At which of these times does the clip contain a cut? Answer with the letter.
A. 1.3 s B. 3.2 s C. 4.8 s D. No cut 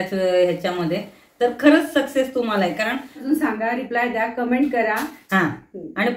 B